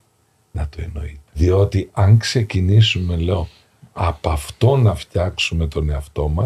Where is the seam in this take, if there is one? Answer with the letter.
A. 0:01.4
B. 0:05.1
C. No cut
A